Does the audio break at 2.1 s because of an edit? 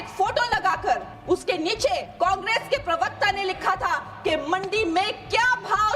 yes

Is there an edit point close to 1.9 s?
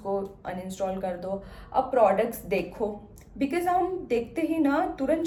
no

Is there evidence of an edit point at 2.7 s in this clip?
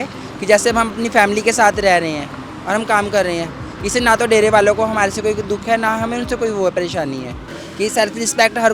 no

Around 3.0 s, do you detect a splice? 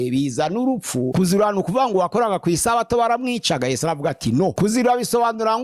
no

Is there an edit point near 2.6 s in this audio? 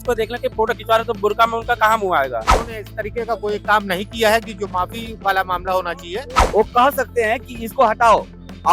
yes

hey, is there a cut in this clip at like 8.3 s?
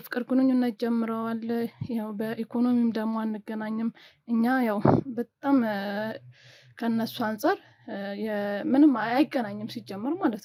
no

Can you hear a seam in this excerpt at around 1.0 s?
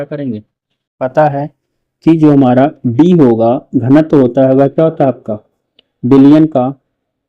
yes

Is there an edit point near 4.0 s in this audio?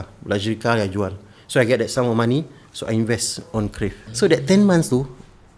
yes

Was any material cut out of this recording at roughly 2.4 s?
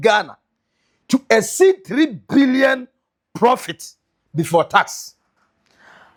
no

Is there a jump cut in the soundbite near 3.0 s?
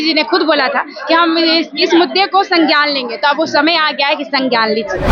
no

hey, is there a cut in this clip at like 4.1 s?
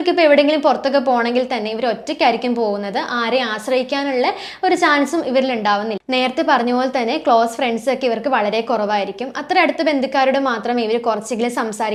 no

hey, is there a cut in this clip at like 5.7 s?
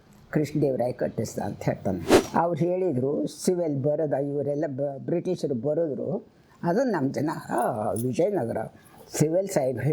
no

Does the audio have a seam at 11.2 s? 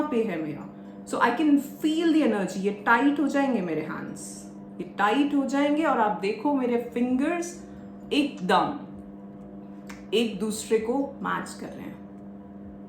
no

